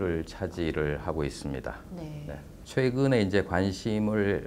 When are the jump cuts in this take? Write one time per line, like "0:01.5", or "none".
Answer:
0:02.5